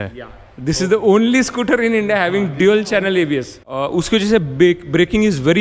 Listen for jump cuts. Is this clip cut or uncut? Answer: uncut